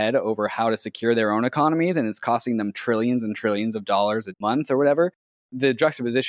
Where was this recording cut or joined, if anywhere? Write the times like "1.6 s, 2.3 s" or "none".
4.4 s, 5.5 s